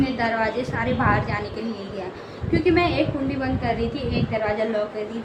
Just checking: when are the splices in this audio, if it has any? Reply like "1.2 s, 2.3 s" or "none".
none